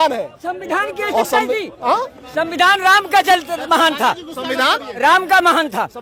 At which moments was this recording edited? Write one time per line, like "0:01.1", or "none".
none